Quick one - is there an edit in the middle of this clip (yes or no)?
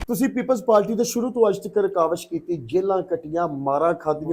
no